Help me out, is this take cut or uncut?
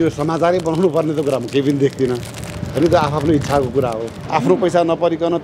cut